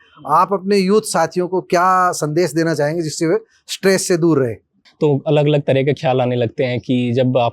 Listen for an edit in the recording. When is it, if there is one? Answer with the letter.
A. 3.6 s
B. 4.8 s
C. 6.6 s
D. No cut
B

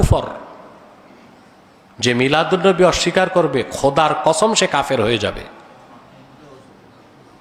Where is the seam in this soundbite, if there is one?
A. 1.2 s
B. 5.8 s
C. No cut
C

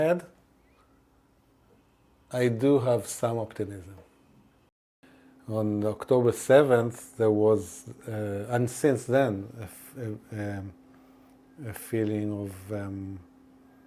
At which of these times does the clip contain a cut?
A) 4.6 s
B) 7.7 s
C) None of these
A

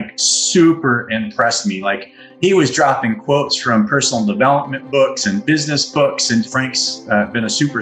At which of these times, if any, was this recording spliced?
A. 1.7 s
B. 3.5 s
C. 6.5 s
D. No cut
C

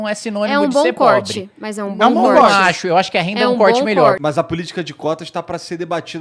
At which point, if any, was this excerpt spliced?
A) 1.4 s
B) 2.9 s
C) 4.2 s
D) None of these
C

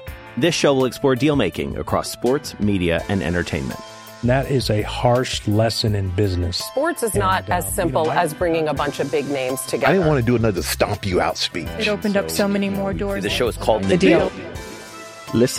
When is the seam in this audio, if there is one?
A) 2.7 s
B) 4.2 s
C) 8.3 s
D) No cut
D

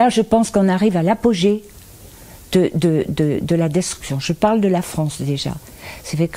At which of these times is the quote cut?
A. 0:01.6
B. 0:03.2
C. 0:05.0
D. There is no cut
D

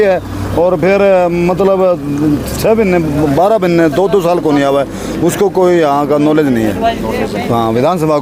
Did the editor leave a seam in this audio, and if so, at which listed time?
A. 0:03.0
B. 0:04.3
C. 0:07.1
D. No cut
D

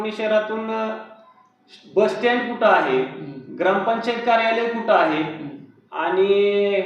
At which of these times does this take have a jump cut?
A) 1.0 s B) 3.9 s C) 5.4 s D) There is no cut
D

